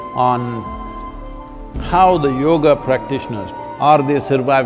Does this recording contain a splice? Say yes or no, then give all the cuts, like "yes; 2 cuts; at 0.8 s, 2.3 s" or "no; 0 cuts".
yes; 1 cut; at 3.4 s